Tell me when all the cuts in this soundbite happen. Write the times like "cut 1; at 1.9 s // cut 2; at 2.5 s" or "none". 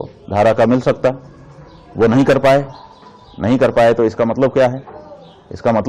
none